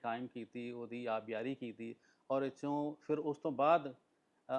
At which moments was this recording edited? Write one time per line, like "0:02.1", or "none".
none